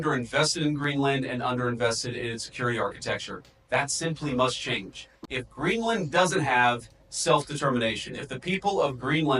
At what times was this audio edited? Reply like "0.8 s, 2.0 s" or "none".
none

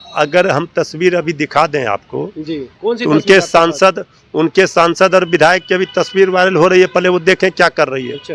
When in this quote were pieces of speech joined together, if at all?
none

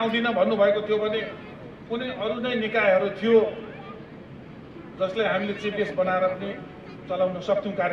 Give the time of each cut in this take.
none

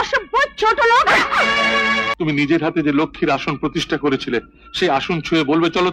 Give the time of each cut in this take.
2.1 s

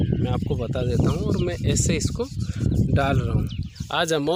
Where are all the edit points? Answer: none

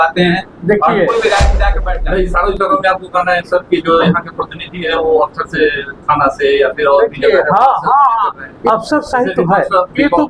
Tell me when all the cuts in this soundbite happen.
1.7 s, 8.5 s

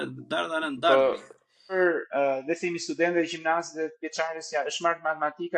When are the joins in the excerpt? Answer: 1.7 s

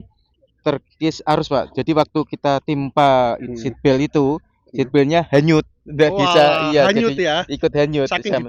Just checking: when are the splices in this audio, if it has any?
none

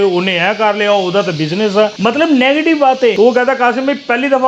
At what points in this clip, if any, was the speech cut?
1.9 s, 3.1 s

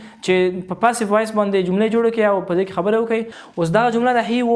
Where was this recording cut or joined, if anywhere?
3.4 s

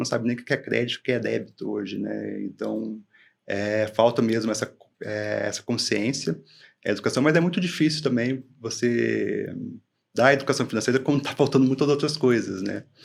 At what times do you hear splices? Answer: none

